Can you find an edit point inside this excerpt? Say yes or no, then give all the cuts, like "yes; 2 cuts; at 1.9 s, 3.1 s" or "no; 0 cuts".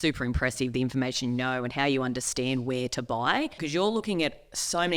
yes; 1 cut; at 3.6 s